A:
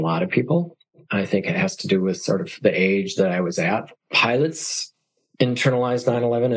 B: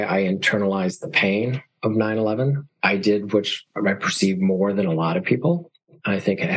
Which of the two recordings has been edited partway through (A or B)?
B